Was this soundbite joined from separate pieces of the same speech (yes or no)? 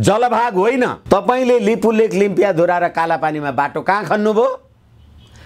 yes